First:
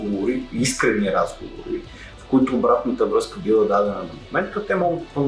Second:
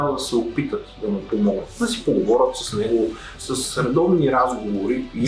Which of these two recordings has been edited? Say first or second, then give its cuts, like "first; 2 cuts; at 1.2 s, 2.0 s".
second; 2 cuts; at 1.7 s, 3.4 s